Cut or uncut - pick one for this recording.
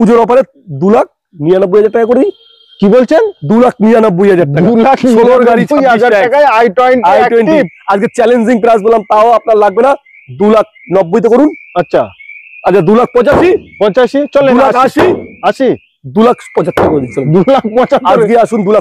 uncut